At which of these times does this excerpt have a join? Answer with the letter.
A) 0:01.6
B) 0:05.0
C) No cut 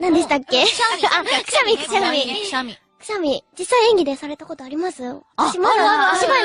B